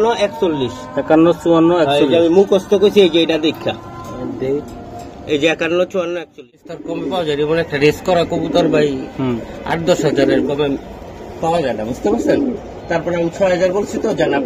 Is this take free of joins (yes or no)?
no